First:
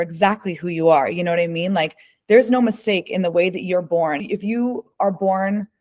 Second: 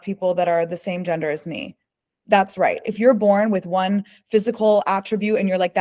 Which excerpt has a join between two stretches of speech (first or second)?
first